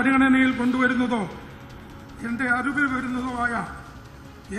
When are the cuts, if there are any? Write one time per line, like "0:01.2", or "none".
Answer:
none